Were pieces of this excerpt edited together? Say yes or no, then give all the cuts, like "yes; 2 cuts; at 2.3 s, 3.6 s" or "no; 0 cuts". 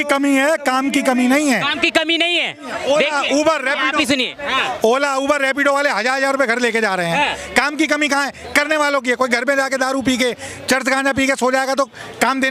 no; 0 cuts